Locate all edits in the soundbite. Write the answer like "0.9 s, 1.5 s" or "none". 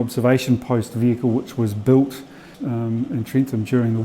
2.5 s